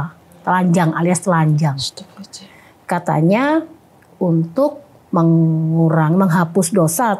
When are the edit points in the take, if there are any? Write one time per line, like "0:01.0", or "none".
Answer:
none